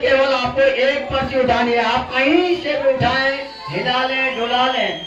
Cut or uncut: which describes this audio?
uncut